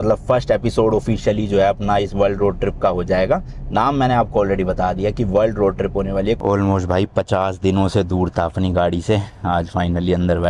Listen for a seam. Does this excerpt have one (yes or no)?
yes